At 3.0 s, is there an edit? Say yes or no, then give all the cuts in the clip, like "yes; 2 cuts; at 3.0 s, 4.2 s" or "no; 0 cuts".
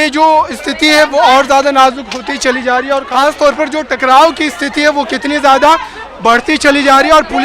yes; 1 cut; at 3.0 s